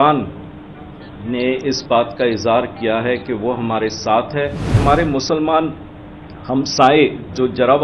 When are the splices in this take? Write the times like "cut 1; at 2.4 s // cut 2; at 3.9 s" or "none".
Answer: cut 1; at 4.8 s